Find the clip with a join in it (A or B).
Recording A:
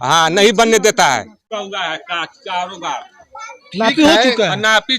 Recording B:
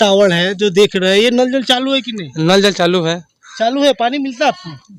A